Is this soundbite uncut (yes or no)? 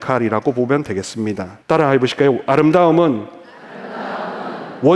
no